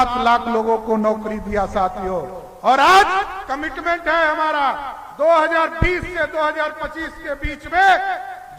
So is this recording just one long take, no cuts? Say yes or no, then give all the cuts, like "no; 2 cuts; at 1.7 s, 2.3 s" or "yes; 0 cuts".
yes; 0 cuts